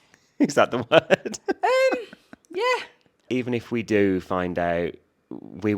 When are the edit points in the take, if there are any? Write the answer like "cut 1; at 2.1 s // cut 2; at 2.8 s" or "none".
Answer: cut 1; at 3.2 s

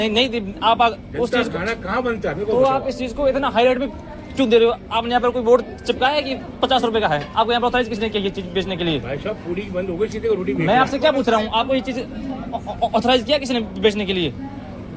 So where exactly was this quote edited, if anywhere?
none

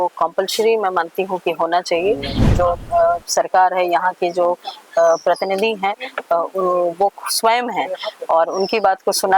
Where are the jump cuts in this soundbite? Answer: cut 1; at 2.4 s

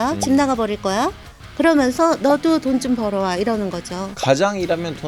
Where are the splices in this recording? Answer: none

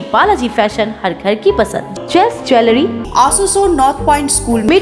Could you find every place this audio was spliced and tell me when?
cut 1; at 3.0 s

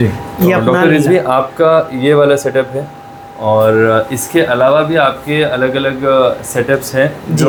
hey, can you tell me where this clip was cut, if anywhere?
none

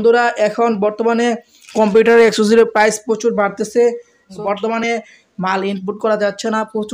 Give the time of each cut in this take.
cut 1; at 4.5 s

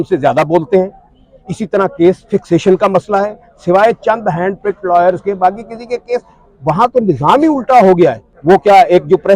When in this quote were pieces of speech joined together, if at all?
cut 1; at 8.3 s

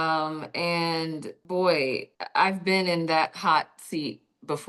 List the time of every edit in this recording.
cut 1; at 1.3 s // cut 2; at 2.1 s

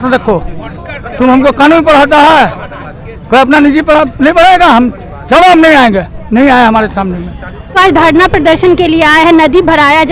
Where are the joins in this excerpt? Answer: cut 1; at 7.8 s

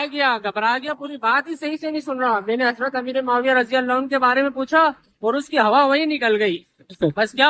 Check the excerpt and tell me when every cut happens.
none

